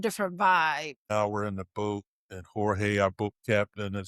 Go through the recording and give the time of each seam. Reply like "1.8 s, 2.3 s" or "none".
1.1 s